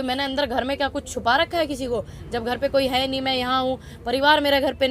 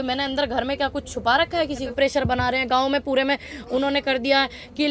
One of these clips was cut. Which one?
second; 1 cut; at 1.9 s

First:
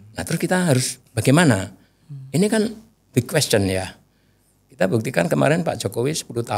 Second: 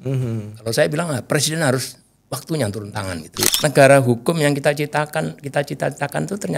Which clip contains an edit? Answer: second; 1 cut; at 3.5 s

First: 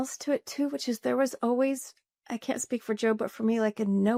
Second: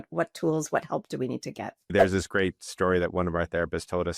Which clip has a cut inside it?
second; 1 cut; at 1.9 s

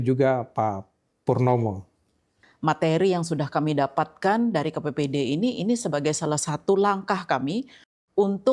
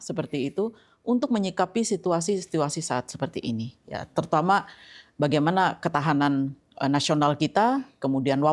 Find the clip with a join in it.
first; 1 cut; at 2.4 s

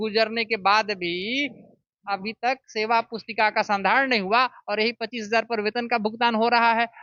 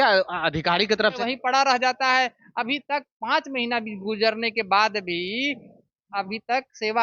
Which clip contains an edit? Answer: second; 1 cut; at 1.2 s

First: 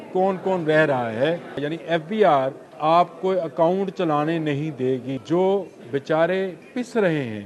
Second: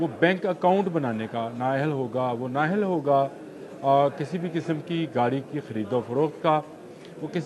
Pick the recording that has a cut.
first; 3 cuts; at 1.7 s, 2.6 s, 5.1 s

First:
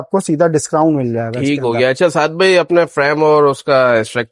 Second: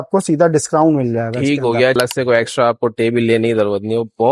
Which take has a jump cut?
second; 1 cut; at 2.0 s

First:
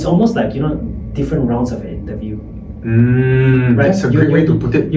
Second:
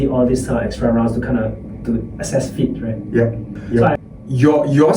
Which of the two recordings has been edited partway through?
second; 1 cut; at 3.9 s

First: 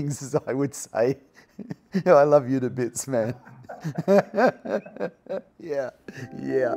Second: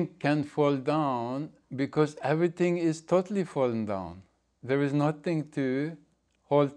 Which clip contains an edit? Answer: first; 1 cut; at 5.5 s

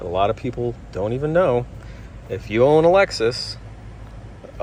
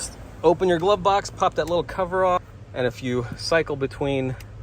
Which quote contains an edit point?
second; 1 cut; at 2.6 s

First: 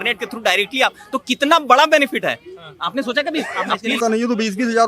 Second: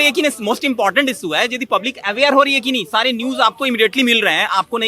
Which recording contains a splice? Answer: first; 1 cut; at 4.0 s

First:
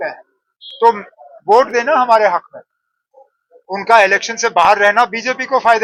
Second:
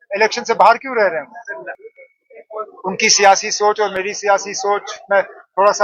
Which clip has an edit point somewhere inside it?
second; 1 cut; at 1.8 s

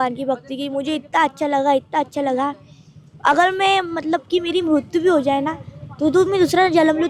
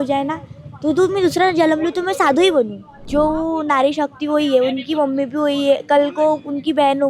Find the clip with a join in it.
second; 1 cut; at 3.0 s

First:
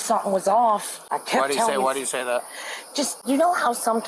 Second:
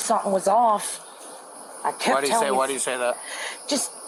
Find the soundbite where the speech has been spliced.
first; 2 cuts; at 1.0 s, 3.2 s

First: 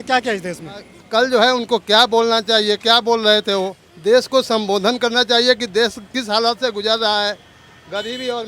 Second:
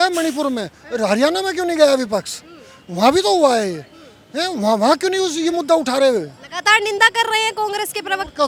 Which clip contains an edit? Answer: first; 2 cuts; at 0.9 s, 3.8 s

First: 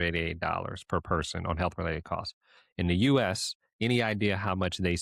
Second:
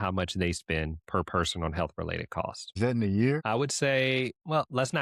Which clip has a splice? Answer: second; 2 cuts; at 2.6 s, 3.4 s

